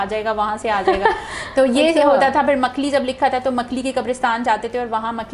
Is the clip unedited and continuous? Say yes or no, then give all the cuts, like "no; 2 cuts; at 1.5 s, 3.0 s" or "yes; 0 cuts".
yes; 0 cuts